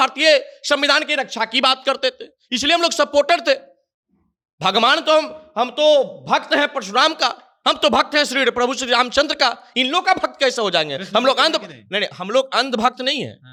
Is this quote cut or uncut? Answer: uncut